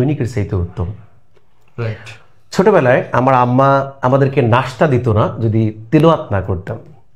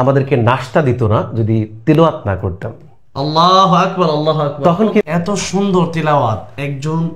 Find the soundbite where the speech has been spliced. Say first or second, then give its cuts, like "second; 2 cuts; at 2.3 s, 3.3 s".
second; 1 cut; at 5.0 s